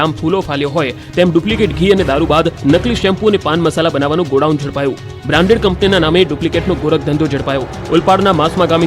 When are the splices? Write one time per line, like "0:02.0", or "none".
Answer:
0:01.5